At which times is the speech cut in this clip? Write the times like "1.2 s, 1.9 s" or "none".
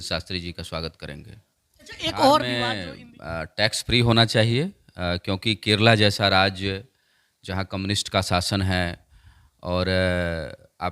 2.7 s

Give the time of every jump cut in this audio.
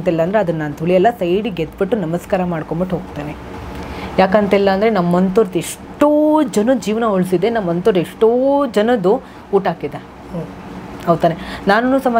none

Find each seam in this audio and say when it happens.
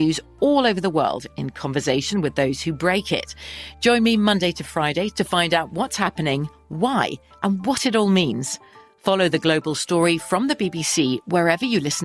none

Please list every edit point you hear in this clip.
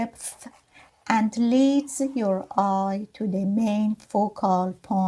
none

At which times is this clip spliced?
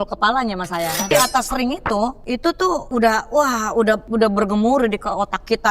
1.1 s, 2.6 s, 4.1 s

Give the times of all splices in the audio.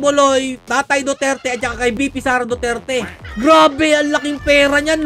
3.2 s

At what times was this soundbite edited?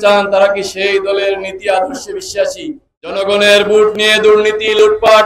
3.2 s

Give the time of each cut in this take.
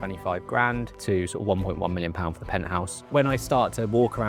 1.0 s, 3.0 s

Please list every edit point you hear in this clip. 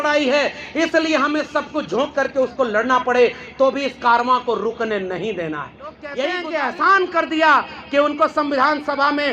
6.3 s

